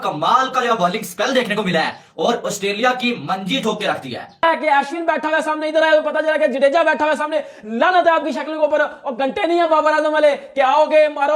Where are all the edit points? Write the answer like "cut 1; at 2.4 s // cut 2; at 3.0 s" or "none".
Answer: cut 1; at 4.2 s